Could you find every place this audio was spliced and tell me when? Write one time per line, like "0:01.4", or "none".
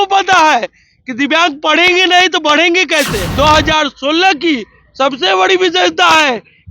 0:03.2